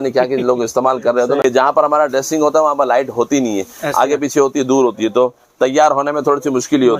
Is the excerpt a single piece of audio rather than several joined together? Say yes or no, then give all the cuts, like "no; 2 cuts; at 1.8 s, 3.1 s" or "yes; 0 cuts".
no; 1 cut; at 1.4 s